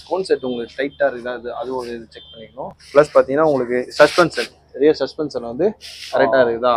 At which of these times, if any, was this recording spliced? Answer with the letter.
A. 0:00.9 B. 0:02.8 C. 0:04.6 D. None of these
B